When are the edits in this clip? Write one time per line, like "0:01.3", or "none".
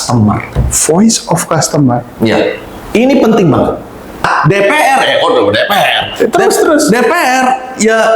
0:04.2